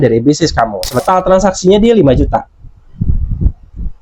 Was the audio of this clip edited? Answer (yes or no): yes